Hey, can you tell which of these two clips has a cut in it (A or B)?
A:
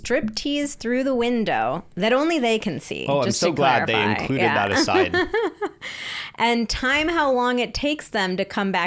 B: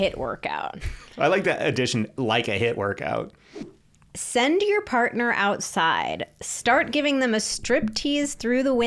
B